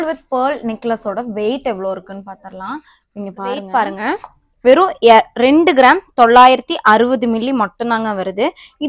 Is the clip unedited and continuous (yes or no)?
yes